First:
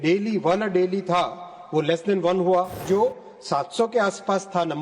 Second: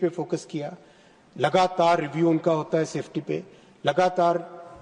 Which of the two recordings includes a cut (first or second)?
first